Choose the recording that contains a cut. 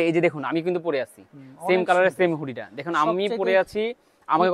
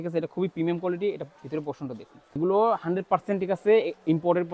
second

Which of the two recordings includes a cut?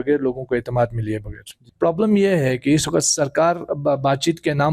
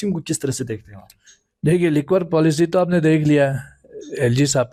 first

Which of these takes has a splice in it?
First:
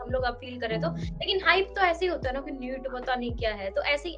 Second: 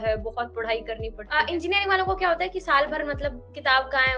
second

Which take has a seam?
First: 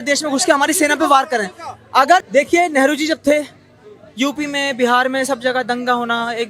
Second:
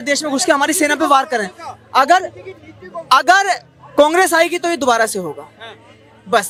first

